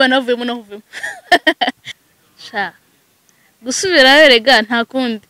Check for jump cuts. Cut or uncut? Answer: cut